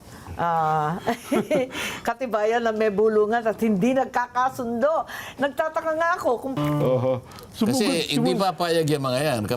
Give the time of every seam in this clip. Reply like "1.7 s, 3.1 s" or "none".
6.5 s